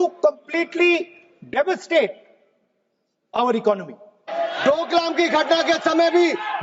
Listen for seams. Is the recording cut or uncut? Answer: cut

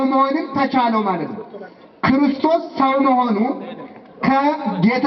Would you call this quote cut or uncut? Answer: uncut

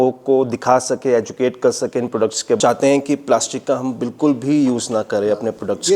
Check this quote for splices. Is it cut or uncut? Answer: cut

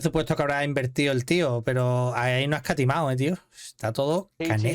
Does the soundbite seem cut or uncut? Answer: uncut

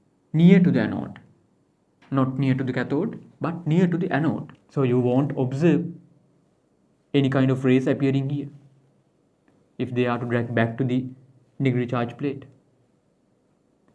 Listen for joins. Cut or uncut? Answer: cut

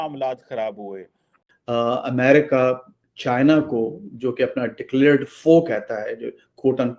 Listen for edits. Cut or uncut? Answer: cut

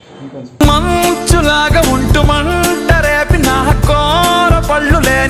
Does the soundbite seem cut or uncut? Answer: uncut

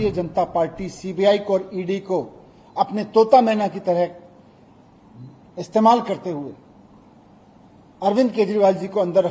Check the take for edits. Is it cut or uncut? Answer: uncut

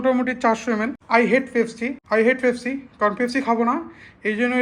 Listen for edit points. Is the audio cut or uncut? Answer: cut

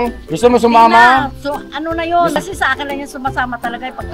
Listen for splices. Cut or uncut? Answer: uncut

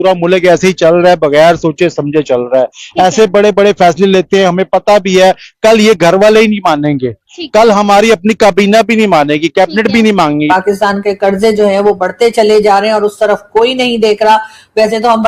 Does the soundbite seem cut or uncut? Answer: cut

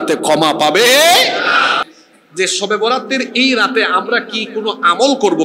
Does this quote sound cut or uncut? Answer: cut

